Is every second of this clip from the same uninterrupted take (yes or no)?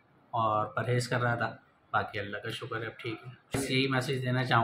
no